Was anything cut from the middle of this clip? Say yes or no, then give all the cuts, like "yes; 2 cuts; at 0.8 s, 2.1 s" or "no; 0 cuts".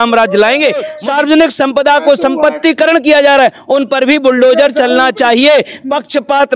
yes; 1 cut; at 1.0 s